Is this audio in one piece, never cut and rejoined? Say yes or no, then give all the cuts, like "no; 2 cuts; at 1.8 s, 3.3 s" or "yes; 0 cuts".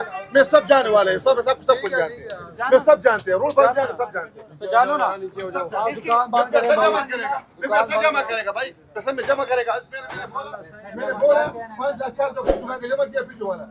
yes; 0 cuts